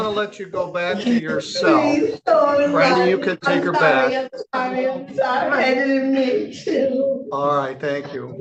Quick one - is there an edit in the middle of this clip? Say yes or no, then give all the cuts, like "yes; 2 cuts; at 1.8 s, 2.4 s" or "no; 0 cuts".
no; 0 cuts